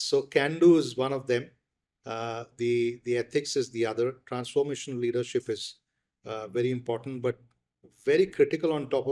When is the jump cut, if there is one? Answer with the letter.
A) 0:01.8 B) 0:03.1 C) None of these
C